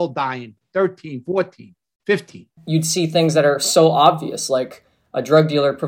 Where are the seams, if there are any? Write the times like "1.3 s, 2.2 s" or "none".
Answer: 2.6 s